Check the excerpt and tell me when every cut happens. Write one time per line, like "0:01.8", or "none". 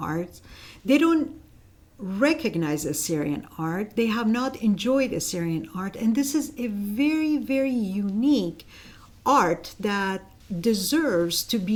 none